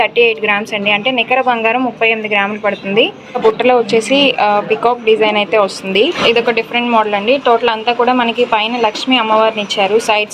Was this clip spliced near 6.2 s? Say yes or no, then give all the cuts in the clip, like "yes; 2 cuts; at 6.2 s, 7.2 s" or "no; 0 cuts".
yes; 2 cuts; at 3.4 s, 6.2 s